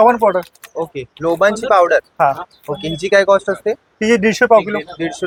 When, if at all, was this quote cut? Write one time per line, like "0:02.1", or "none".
none